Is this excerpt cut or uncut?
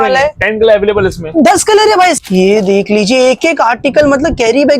cut